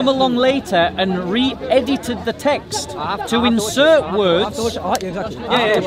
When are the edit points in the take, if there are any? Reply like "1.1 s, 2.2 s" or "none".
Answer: none